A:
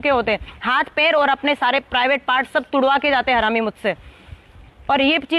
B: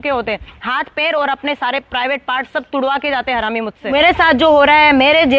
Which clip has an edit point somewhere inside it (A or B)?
B